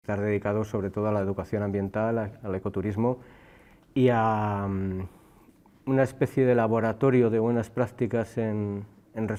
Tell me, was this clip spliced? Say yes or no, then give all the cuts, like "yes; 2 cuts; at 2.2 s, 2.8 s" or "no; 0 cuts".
no; 0 cuts